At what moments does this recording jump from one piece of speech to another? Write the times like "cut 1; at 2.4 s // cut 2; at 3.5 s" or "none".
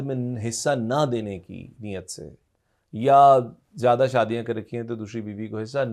none

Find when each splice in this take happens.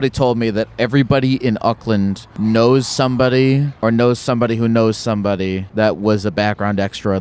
cut 1; at 2.3 s // cut 2; at 3.7 s // cut 3; at 5.6 s

